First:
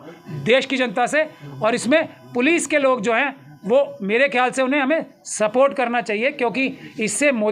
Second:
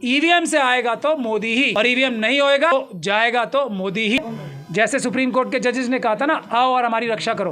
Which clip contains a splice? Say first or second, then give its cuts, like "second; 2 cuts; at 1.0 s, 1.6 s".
second; 3 cuts; at 1.7 s, 2.7 s, 4.2 s